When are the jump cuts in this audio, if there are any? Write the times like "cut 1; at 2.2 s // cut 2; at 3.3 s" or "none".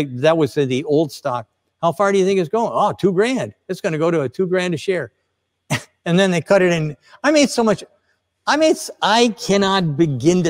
none